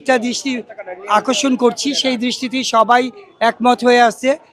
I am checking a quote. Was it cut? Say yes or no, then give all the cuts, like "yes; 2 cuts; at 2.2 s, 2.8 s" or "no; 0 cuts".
no; 0 cuts